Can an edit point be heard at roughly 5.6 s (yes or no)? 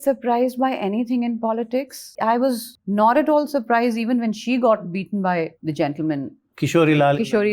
no